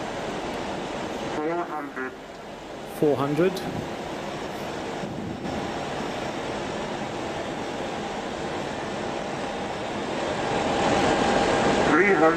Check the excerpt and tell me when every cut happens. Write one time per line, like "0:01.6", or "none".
none